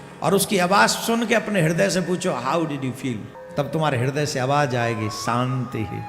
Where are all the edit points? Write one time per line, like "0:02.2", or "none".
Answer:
0:03.3